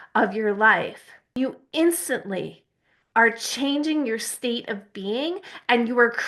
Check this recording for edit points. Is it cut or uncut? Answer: cut